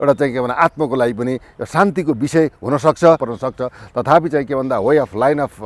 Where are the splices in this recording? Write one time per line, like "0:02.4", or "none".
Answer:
0:03.3